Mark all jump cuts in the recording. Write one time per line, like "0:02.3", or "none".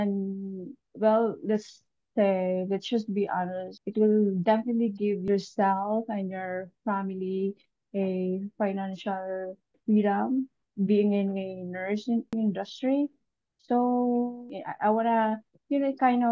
0:05.2
0:10.7
0:12.3